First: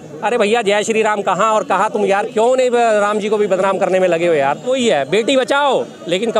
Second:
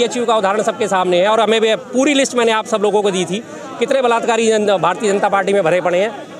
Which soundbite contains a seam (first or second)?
first